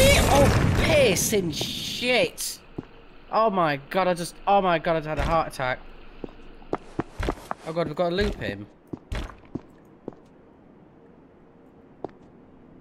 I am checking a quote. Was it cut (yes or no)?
no